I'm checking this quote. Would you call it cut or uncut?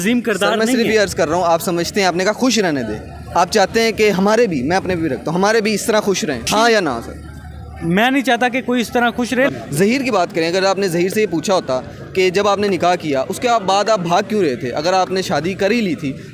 cut